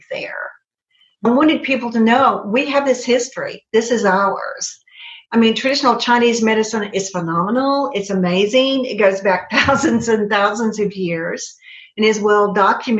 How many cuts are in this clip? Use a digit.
1